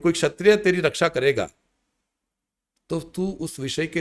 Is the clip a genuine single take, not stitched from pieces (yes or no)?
yes